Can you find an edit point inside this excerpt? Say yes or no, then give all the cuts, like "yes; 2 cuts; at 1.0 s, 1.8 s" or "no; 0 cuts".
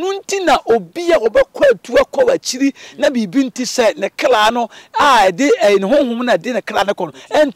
no; 0 cuts